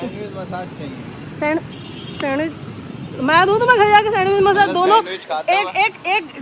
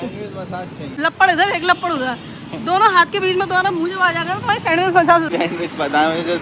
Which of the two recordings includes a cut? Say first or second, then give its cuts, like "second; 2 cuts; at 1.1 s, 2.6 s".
second; 2 cuts; at 0.9 s, 5.3 s